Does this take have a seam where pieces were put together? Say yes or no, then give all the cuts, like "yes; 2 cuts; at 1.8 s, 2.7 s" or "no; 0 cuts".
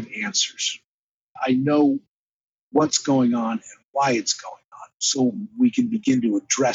yes; 2 cuts; at 1.4 s, 5.0 s